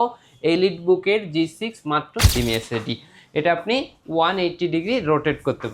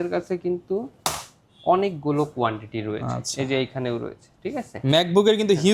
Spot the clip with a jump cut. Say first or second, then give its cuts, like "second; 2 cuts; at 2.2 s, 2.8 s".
first; 1 cut; at 2.3 s